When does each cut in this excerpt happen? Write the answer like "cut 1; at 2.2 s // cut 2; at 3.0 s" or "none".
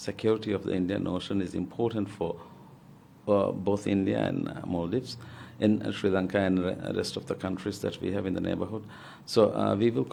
none